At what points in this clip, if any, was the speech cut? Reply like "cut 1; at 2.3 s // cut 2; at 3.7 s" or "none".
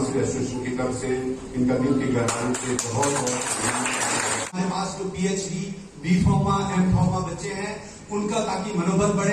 cut 1; at 4.6 s